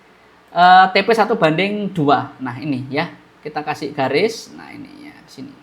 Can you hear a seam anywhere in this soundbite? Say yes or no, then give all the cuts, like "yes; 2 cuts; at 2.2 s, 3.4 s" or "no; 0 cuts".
no; 0 cuts